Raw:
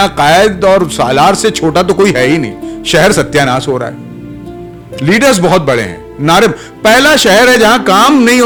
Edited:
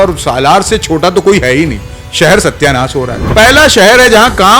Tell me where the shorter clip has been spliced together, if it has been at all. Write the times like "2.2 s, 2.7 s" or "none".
3.2 s